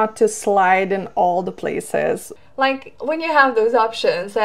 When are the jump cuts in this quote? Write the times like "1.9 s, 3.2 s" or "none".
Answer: 2.3 s